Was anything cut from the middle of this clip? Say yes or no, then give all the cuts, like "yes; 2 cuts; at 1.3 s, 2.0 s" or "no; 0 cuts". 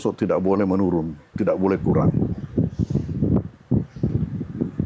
no; 0 cuts